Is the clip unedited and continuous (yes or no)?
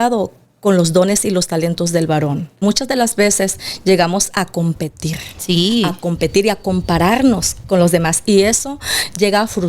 no